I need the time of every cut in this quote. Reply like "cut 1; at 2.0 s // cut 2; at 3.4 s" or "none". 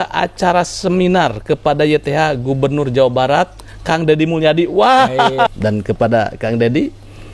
cut 1; at 5.5 s